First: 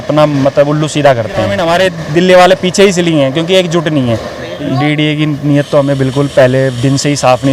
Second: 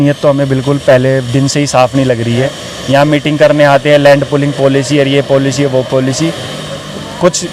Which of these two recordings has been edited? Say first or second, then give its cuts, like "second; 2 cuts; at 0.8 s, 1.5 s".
first; 2 cuts; at 1.8 s, 4.5 s